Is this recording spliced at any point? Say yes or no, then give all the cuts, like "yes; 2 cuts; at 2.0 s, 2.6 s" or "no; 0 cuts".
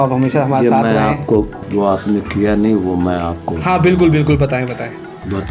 yes; 1 cut; at 1.6 s